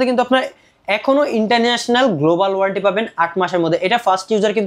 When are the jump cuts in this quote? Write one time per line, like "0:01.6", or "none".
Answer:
none

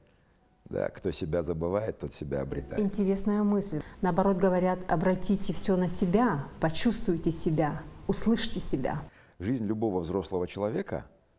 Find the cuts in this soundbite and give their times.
0:04.1
0:09.0

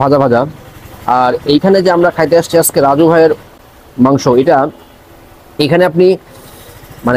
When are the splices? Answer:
none

